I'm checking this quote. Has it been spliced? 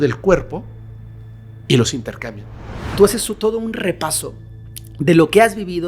yes; 1 cut; at 2.9 s

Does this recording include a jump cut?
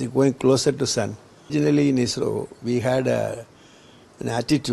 yes; 1 cut; at 1.5 s

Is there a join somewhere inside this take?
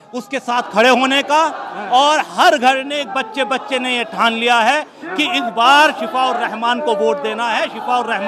no; 0 cuts

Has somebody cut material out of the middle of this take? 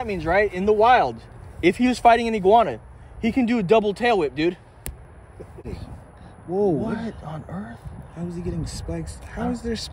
yes; 1 cut; at 5.6 s

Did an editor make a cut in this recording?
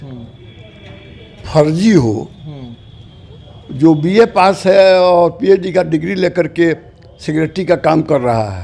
no; 0 cuts

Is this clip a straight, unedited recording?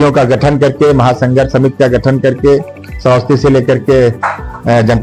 yes; 0 cuts

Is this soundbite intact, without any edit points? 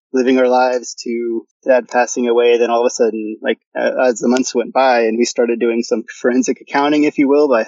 yes; 0 cuts

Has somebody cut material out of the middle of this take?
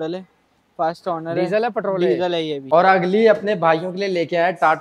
yes; 1 cut; at 2.6 s

